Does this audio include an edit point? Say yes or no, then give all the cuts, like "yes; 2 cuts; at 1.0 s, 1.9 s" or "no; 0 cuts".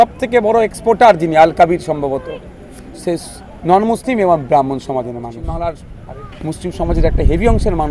yes; 1 cut; at 5.4 s